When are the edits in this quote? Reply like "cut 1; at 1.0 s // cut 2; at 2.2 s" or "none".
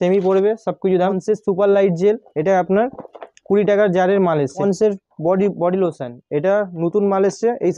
cut 1; at 1.2 s // cut 2; at 4.6 s